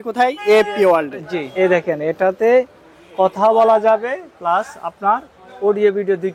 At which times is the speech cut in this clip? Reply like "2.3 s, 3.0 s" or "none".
1.4 s